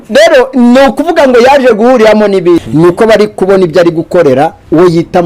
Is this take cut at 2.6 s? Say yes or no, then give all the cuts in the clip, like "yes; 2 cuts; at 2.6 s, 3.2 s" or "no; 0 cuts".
yes; 1 cut; at 2.6 s